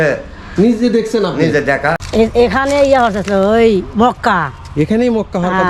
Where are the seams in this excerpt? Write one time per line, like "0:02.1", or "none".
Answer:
0:02.0